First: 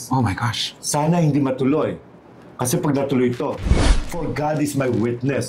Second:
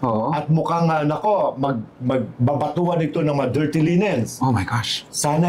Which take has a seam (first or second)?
first